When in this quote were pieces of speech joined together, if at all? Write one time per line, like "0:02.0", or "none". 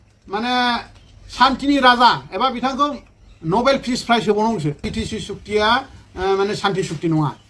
0:04.8